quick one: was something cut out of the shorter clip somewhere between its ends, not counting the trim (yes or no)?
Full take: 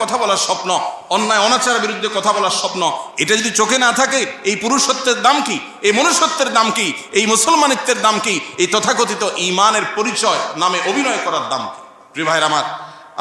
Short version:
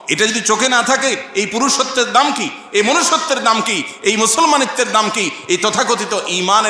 no